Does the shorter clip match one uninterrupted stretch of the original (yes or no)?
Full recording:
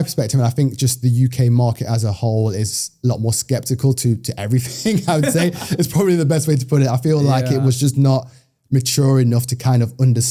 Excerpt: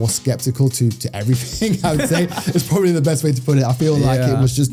yes